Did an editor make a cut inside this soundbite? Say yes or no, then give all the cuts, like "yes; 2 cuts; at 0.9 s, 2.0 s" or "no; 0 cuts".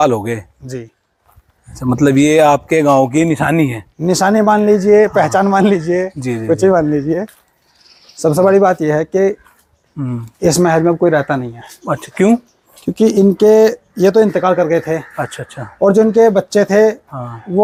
no; 0 cuts